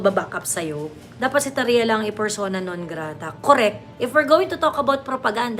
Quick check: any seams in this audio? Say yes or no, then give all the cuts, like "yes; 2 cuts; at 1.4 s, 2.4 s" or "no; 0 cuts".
yes; 2 cuts; at 1.0 s, 3.9 s